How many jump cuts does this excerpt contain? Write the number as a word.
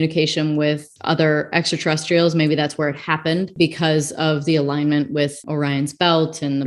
three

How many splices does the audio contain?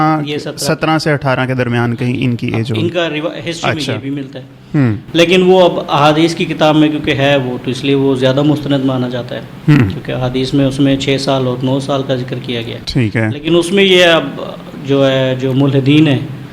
zero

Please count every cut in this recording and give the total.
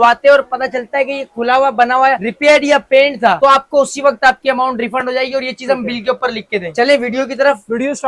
zero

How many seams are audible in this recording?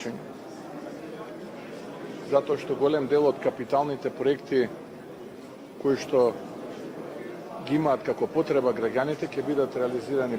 zero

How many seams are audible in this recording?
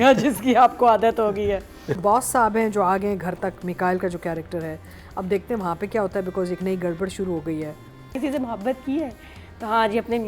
two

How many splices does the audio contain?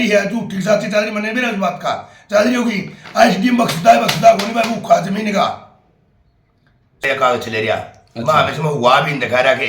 one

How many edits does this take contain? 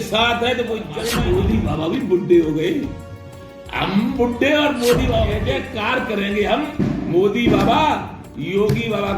two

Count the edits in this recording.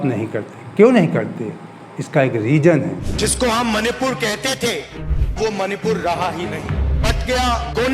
one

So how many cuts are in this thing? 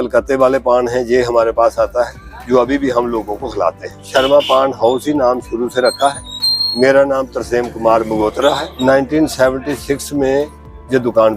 two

